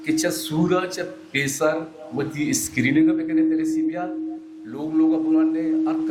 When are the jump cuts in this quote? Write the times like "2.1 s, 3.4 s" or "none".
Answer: none